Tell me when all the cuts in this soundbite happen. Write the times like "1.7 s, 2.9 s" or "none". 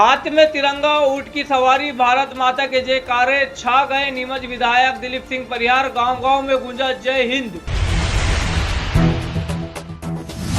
7.7 s